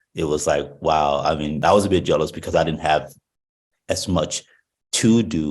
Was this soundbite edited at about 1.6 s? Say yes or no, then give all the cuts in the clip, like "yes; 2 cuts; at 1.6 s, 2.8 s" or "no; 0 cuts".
yes; 1 cut; at 1.6 s